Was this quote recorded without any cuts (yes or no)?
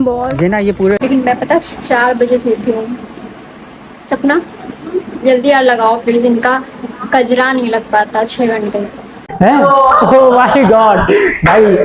no